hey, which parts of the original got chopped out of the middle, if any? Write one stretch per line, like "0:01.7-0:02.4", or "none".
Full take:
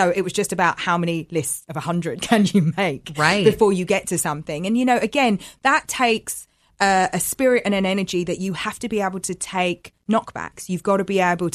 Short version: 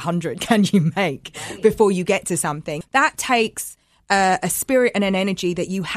0:04.6-0:05.5